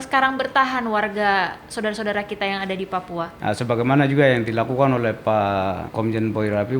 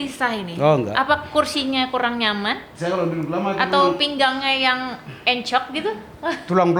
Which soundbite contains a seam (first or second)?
first